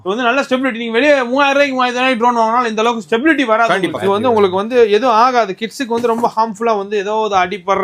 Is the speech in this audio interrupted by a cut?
yes; 1 cut; at 3.8 s

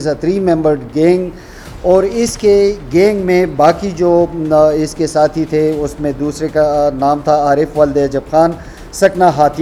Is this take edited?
no; 0 cuts

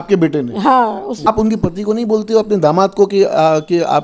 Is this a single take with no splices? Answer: no; 1 cut; at 1.2 s

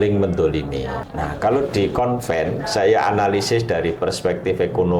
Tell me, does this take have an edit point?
yes; 1 cut; at 1.0 s

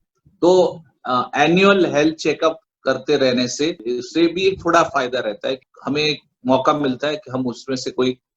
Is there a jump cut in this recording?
yes; 2 cuts; at 3.9 s, 5.7 s

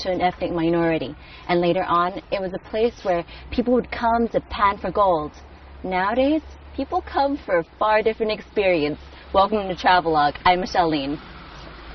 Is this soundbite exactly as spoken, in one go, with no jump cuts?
no; 1 cut; at 4.3 s

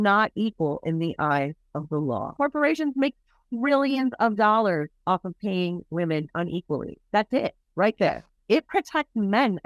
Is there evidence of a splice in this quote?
yes; 2 cuts; at 2.3 s, 8.4 s

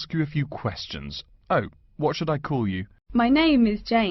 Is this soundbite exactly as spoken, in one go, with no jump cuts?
no; 1 cut; at 2.9 s

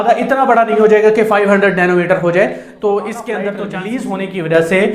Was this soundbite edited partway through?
yes; 1 cut; at 3.7 s

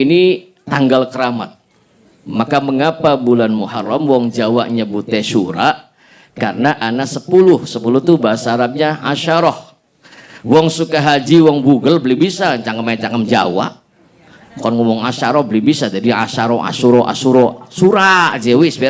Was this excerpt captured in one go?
yes; 0 cuts

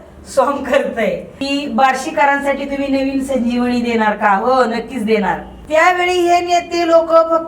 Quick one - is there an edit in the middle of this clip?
yes; 2 cuts; at 1.3 s, 5.5 s

